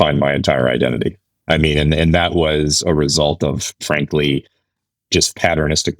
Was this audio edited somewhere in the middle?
no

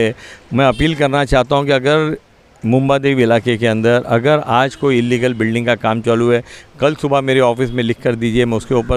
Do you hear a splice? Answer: no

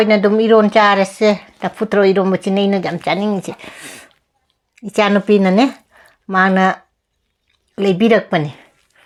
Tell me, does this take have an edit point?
no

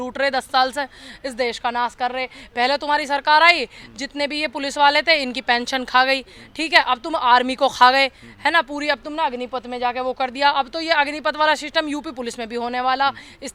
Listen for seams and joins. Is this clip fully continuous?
yes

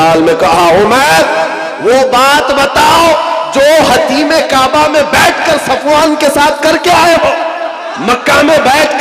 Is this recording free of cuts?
no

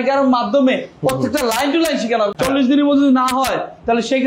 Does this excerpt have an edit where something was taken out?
yes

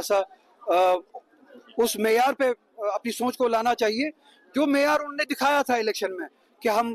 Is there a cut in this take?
yes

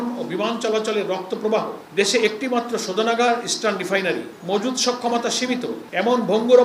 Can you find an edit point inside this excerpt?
yes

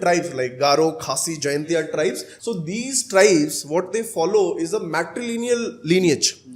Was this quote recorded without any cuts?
no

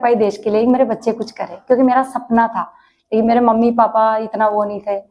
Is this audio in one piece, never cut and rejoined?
yes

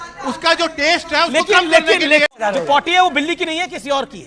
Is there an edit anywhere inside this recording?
yes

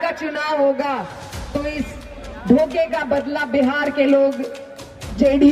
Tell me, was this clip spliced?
no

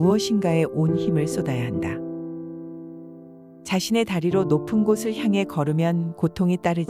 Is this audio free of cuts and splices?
yes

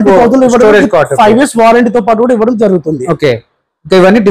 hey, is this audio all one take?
yes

